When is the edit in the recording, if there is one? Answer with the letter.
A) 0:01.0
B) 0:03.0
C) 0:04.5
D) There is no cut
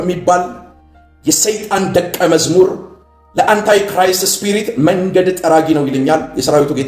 D